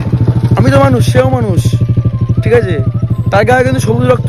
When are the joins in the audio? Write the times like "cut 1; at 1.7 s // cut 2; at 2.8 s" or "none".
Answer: none